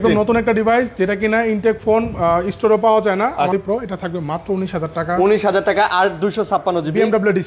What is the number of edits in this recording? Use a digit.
1